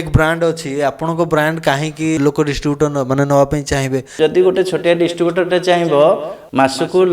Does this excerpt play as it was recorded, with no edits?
no; 2 cuts; at 2.2 s, 4.1 s

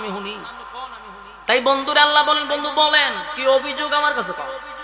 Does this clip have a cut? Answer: no; 0 cuts

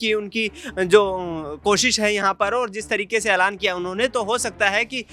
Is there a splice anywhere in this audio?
no; 0 cuts

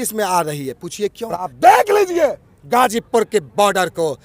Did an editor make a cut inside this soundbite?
yes; 1 cut; at 1.5 s

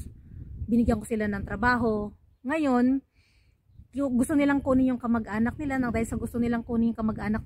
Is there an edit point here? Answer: no; 0 cuts

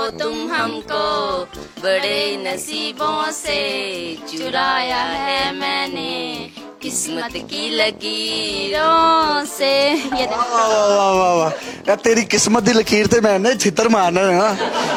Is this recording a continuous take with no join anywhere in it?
yes; 0 cuts

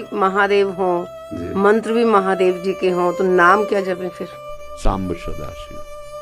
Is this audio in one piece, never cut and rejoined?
yes; 0 cuts

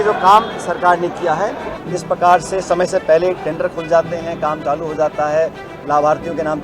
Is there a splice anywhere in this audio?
yes; 1 cut; at 1.7 s

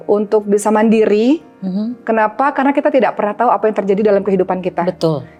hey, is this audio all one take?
yes; 0 cuts

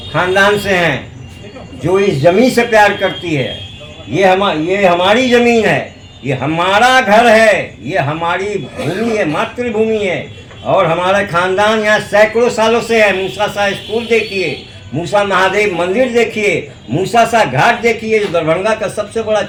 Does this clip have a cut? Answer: no; 0 cuts

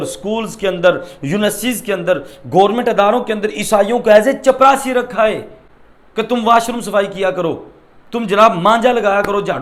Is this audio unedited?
yes; 0 cuts

